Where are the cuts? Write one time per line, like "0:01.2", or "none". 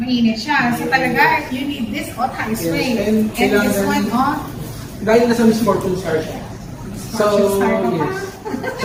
none